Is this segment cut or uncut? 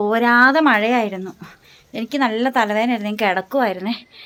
uncut